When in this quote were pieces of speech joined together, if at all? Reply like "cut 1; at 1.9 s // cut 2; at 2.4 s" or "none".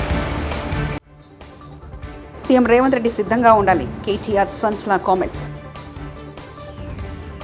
cut 1; at 1.0 s